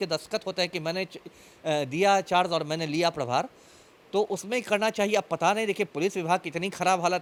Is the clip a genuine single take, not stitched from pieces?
yes; 0 cuts

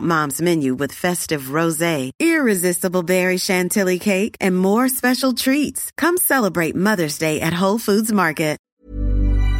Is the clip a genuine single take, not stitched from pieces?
no; 1 cut; at 8.7 s

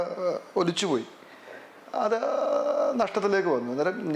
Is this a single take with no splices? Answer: yes; 0 cuts

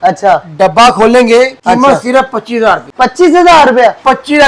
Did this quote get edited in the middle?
yes; 2 cuts; at 1.6 s, 2.9 s

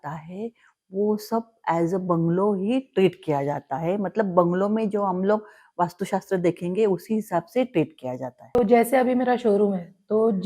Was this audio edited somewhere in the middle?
yes; 1 cut; at 8.6 s

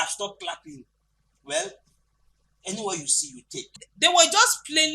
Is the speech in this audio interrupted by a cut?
yes; 1 cut; at 3.8 s

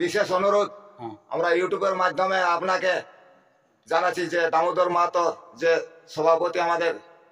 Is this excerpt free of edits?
yes; 0 cuts

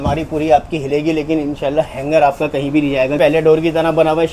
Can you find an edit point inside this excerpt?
yes; 1 cut; at 3.2 s

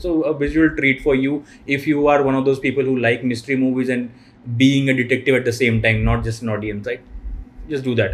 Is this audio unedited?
yes; 0 cuts

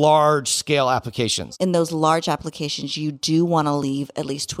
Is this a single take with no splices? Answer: no; 1 cut; at 1.3 s

